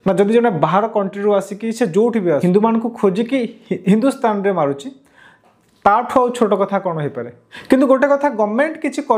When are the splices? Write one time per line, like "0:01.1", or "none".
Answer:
0:02.4
0:07.5

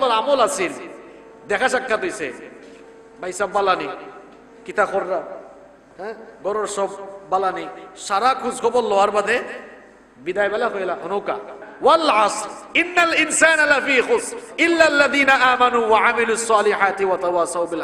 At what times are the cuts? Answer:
0:11.6

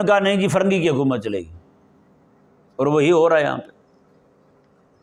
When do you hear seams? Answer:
none

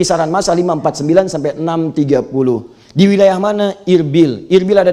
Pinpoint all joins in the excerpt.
none

